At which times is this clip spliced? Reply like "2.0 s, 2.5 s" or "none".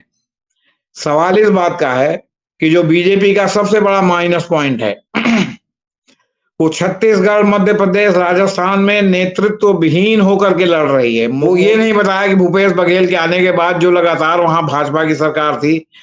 11.4 s